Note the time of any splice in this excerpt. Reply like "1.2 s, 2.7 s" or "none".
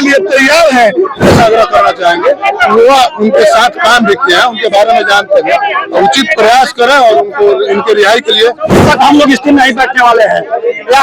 1.2 s, 8.8 s